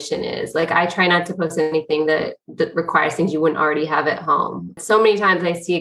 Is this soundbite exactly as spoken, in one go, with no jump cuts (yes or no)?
no